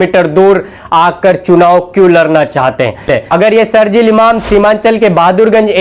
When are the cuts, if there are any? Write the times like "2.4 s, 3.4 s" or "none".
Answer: 3.1 s